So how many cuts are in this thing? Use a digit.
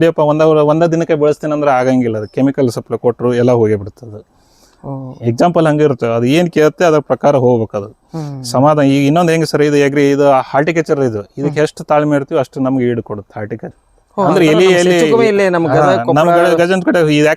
1